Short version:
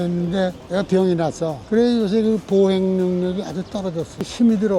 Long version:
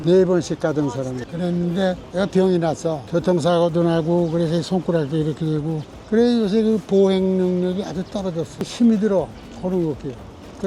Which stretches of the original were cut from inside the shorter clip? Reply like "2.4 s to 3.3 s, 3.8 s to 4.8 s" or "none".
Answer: 3.0 s to 6.0 s